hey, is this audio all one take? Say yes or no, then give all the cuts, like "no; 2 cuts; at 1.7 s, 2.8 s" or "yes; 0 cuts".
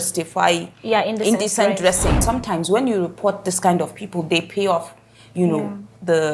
no; 1 cut; at 2.2 s